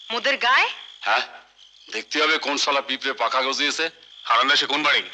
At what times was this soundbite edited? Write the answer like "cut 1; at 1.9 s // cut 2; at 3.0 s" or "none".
cut 1; at 4.1 s